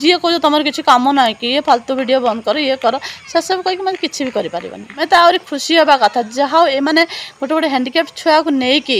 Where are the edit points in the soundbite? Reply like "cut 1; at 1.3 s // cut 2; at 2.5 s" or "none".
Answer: cut 1; at 5.0 s

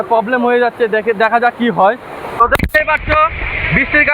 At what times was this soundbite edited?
cut 1; at 2.4 s

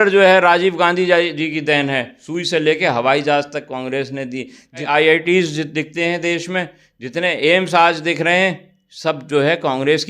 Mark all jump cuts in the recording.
cut 1; at 2.1 s // cut 2; at 4.9 s

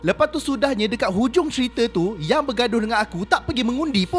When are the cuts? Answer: none

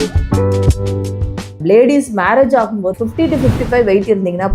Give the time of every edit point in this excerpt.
cut 1; at 1.6 s

